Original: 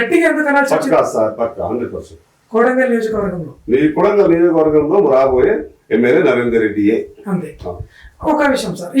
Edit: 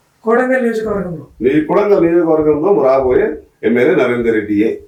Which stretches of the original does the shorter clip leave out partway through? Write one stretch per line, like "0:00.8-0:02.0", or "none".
none